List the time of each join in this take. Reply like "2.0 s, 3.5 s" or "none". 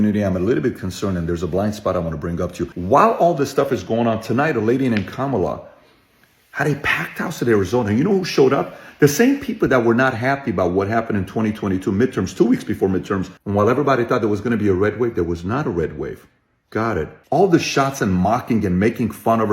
2.7 s, 13.3 s, 17.1 s